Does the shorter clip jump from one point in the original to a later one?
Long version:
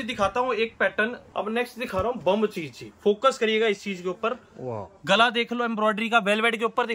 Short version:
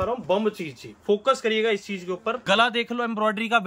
yes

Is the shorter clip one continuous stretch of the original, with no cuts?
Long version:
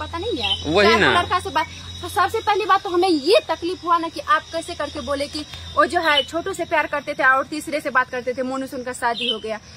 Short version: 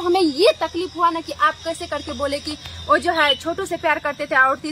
yes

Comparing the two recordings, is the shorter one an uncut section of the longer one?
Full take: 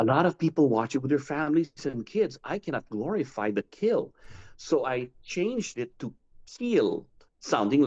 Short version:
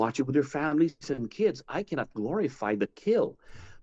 yes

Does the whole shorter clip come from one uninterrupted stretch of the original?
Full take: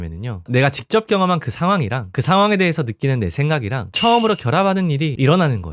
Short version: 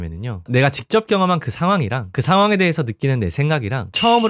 yes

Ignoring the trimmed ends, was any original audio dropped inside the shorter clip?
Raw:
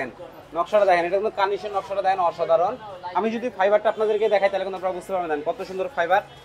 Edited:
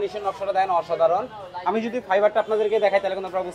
no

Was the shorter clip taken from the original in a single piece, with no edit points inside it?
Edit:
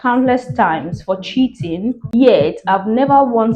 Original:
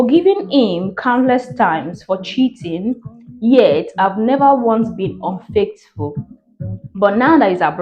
no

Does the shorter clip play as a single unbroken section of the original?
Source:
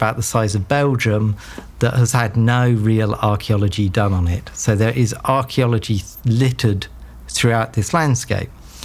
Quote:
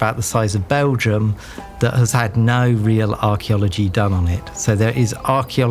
yes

